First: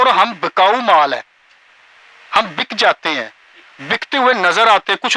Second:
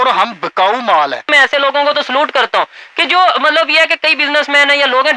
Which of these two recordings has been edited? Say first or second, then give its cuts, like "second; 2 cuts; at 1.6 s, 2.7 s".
second; 1 cut; at 1.3 s